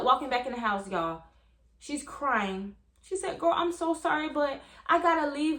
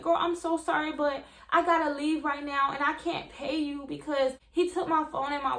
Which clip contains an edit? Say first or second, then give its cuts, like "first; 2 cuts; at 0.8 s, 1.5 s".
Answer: second; 1 cut; at 4.4 s